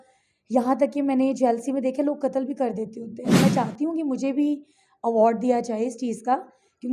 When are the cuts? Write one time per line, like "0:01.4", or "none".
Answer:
0:03.4